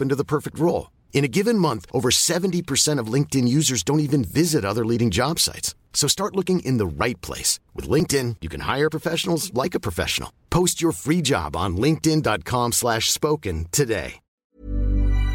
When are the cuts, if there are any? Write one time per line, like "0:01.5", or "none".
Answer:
0:14.4